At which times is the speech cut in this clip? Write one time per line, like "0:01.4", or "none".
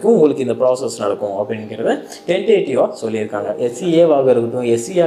0:03.7